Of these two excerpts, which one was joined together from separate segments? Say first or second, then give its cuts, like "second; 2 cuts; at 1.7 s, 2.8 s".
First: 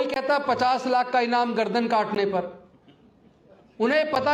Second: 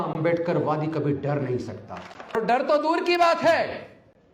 second; 1 cut; at 2.4 s